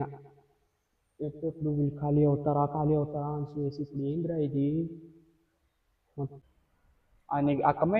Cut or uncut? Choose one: cut